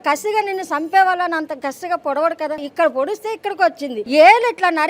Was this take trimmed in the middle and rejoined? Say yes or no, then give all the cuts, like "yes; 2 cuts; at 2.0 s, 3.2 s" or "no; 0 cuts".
yes; 2 cuts; at 2.7 s, 4.0 s